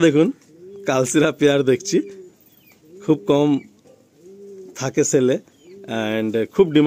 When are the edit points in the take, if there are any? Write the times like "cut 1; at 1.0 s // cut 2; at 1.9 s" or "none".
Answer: none